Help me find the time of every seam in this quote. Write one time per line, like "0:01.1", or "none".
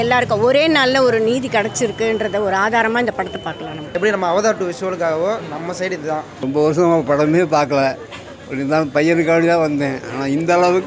0:03.9
0:06.4

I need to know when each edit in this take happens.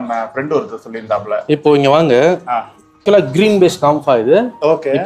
0:03.0

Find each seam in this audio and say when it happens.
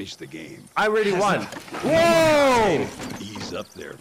none

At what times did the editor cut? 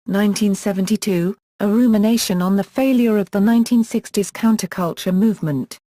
0:04.4

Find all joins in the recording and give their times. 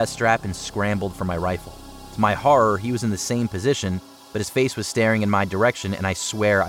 none

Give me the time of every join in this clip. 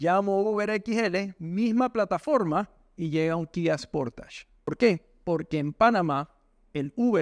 0:04.7

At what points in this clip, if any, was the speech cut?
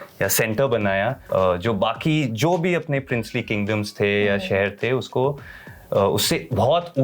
0:01.2

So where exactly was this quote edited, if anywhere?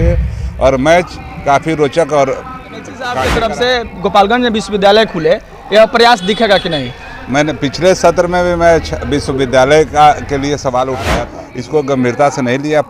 0:03.3
0:11.4

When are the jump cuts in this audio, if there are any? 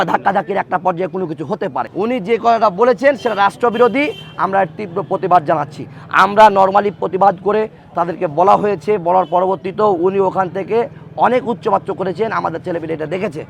0:01.9

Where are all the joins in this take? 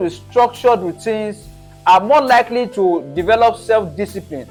none

